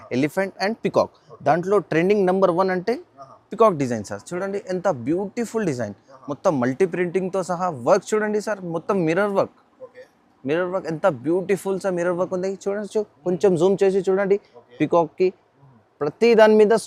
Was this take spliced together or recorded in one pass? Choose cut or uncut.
uncut